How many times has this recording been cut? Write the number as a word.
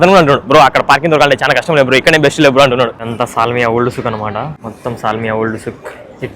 two